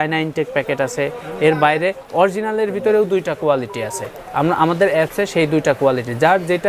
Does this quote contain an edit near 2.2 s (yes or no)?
no